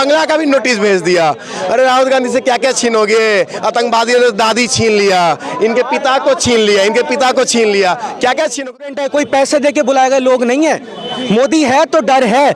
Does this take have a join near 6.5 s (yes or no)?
no